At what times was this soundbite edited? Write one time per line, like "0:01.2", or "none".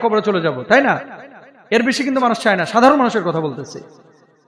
none